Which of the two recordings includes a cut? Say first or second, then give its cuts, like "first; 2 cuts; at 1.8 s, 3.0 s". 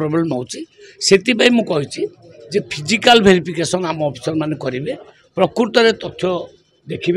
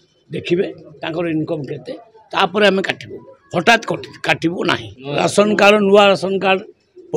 second; 1 cut; at 4.9 s